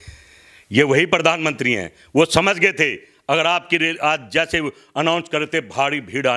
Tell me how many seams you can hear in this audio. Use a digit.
0